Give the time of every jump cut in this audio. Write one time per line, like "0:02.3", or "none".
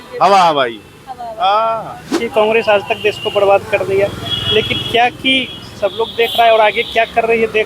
0:02.2